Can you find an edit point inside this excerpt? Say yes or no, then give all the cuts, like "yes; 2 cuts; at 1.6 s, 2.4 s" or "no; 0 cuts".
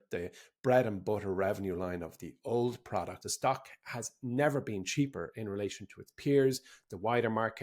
yes; 1 cut; at 3.3 s